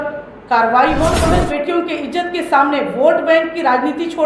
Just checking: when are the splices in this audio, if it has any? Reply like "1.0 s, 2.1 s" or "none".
1.3 s